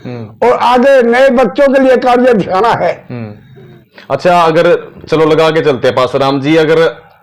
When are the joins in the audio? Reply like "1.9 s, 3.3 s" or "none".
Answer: 4.0 s